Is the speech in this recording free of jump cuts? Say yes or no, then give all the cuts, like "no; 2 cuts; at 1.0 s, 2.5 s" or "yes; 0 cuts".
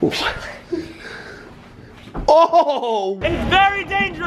no; 1 cut; at 3.2 s